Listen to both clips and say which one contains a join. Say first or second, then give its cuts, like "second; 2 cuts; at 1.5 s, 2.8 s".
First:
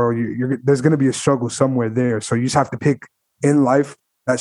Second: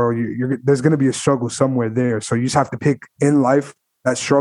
second; 1 cut; at 3.1 s